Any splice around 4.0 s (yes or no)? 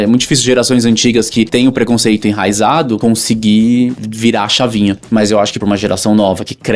yes